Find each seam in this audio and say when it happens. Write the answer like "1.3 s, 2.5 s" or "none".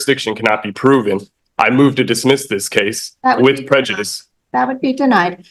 none